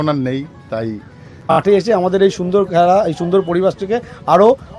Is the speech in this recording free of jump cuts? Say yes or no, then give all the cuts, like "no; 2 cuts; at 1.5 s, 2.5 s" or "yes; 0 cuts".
no; 1 cut; at 1.5 s